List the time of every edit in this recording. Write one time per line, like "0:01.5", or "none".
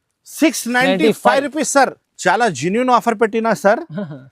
0:02.0